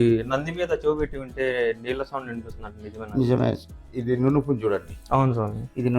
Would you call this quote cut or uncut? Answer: cut